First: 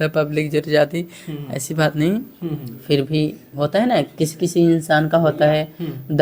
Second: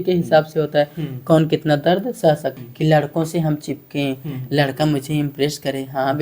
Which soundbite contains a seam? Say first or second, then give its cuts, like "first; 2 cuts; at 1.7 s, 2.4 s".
second; 1 cut; at 2.6 s